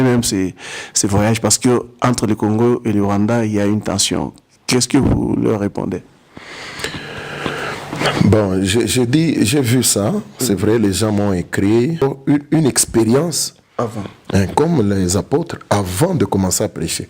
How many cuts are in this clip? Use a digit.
1